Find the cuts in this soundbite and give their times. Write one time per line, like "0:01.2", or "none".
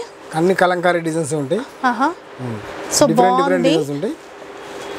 none